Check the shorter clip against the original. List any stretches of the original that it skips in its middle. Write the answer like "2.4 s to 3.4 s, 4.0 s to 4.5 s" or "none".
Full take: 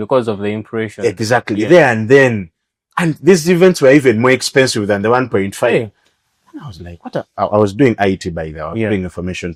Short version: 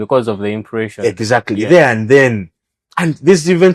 none

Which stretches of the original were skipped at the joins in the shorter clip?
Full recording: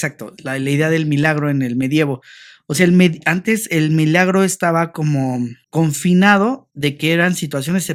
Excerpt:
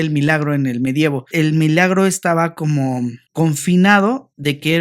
2.2 s to 3.6 s

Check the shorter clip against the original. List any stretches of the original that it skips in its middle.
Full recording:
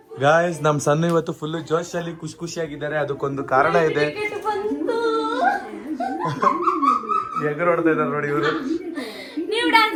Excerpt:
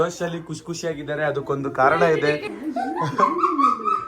4.2 s to 5.7 s

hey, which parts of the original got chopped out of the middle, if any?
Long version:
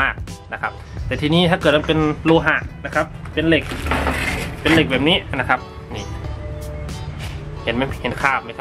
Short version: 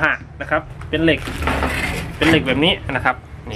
none

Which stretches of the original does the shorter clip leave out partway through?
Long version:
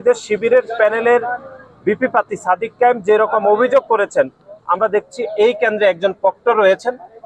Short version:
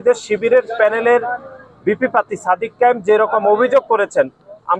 none

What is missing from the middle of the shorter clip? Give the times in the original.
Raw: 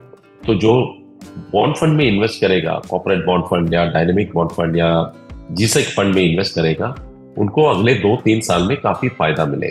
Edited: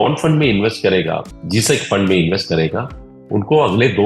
2.9 s to 5.3 s

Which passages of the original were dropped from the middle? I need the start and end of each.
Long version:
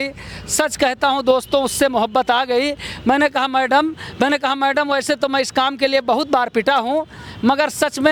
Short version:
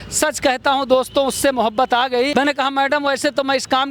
2.7 s to 4.1 s

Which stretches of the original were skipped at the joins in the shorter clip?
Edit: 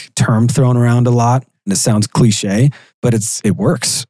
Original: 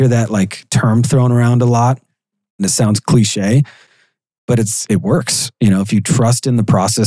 2.1 s to 2.4 s, 3.8 s to 4.3 s

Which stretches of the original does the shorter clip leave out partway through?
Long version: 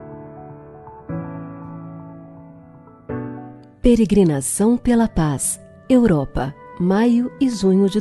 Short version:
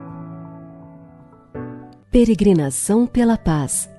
3.5 s to 3.7 s

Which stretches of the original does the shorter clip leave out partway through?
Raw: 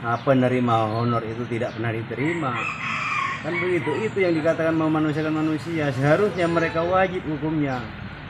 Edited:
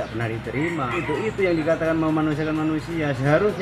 2.6 s to 3.8 s

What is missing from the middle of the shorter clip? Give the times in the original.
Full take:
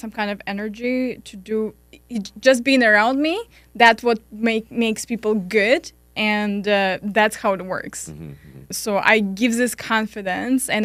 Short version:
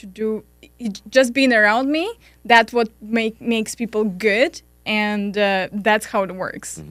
none

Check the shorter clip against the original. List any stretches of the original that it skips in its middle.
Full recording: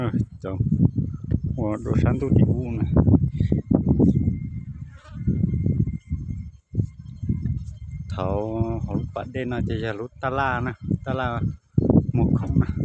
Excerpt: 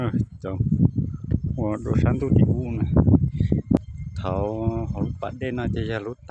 3.8 s to 7.7 s

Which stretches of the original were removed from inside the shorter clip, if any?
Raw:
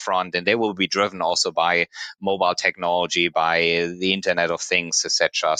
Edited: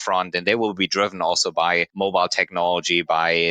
1.9 s to 2.1 s

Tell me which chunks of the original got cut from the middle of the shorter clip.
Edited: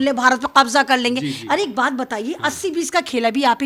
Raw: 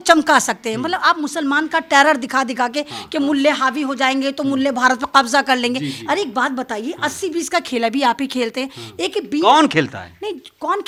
none

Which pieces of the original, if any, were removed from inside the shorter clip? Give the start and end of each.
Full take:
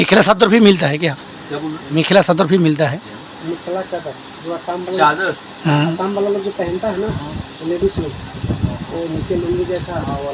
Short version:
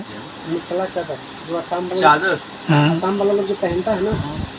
none

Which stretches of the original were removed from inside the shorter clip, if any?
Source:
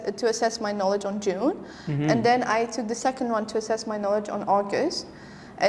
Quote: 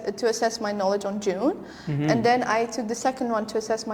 none

